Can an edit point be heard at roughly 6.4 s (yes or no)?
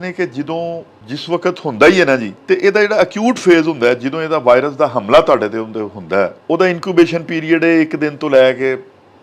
yes